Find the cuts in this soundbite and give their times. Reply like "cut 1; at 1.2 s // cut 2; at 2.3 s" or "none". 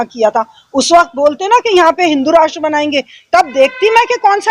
none